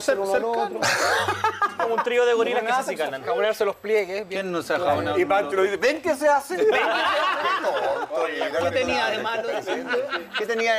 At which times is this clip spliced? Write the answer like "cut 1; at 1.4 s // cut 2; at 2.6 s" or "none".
none